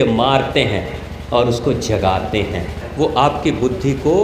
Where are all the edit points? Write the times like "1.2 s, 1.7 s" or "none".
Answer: 2.8 s